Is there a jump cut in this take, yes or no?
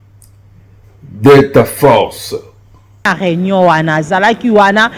yes